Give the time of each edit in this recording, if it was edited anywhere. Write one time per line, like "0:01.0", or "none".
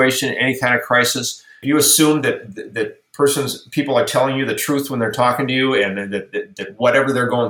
0:01.6

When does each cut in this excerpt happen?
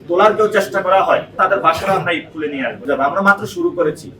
0:01.3
0:02.9

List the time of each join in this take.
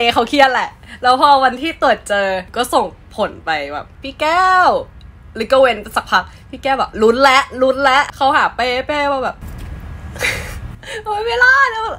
0:02.5
0:03.9
0:08.1
0:09.4

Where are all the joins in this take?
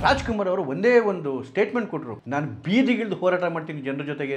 0:02.1

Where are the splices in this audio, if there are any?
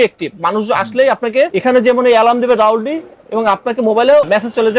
none

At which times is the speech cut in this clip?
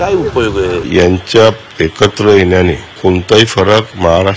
0:00.8
0:03.0

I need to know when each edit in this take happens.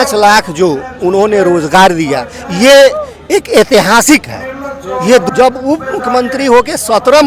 0:05.3

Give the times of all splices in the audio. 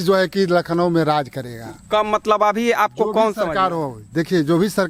none

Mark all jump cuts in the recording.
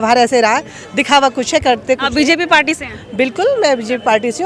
none

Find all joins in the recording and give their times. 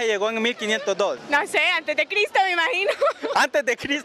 0:03.1

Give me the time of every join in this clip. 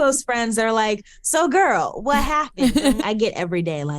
0:03.0

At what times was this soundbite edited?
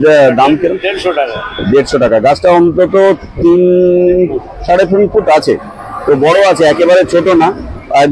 none

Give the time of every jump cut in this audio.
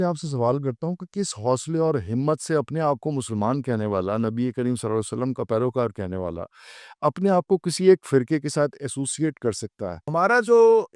0:10.0

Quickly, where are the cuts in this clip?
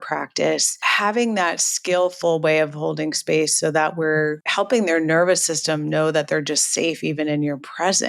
0:00.8
0:04.4

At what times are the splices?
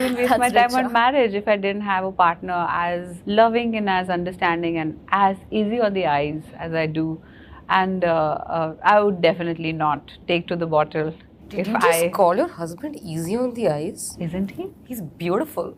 none

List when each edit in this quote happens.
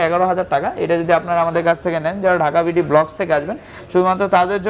none

